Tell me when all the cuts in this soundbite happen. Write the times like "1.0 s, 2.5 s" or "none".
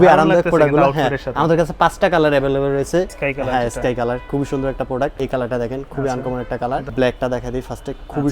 3.2 s, 5.2 s, 6.9 s

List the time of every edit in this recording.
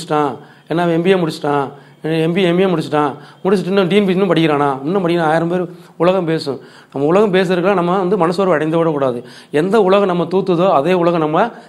none

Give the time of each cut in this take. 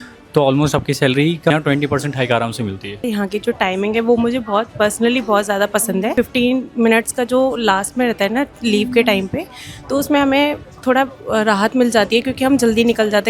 1.5 s, 3.0 s, 6.1 s

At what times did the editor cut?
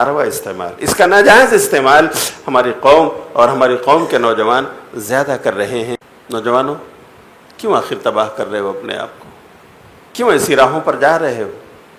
6.1 s

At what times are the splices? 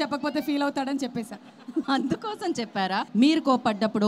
1.9 s, 3.1 s

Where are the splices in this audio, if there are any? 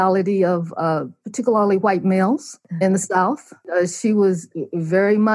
2.6 s, 3.6 s

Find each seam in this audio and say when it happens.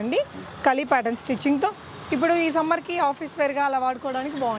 none

